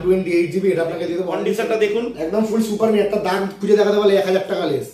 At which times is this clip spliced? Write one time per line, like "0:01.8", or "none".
0:01.4